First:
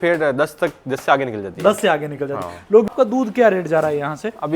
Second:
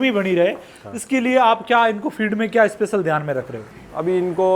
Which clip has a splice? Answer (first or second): first